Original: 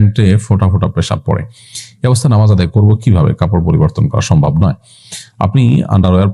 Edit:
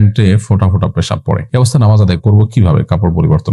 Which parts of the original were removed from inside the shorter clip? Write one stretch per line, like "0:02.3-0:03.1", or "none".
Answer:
0:01.4-0:01.9